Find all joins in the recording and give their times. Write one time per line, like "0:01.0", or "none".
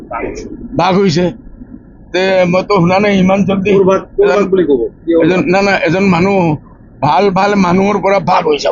none